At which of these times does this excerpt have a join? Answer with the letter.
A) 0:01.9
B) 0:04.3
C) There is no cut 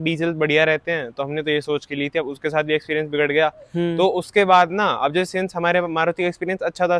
C